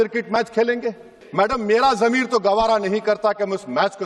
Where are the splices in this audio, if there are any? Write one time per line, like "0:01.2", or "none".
0:01.2